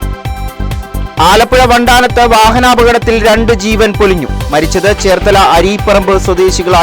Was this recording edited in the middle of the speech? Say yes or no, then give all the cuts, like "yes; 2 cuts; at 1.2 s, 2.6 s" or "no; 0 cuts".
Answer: no; 0 cuts